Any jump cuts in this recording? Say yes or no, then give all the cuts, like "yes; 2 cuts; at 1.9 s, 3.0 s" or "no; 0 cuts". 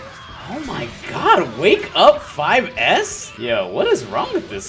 yes; 1 cut; at 3.2 s